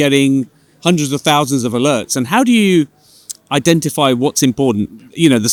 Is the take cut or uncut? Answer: uncut